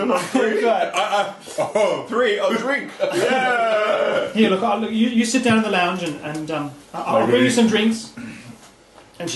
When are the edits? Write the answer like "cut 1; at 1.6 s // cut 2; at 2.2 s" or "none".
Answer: cut 1; at 4.3 s